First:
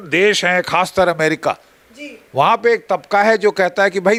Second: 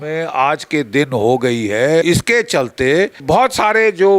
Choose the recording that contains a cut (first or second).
second